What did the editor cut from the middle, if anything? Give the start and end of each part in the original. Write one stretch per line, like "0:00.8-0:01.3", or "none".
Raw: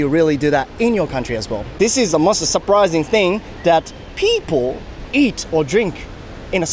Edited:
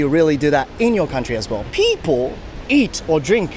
0:01.6-0:04.0